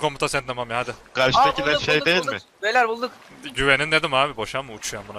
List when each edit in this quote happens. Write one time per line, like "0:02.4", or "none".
0:01.1